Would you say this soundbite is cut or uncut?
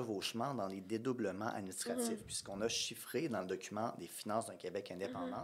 uncut